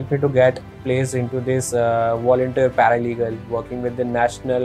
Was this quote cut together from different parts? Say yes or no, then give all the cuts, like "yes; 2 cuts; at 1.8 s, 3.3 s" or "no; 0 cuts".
no; 0 cuts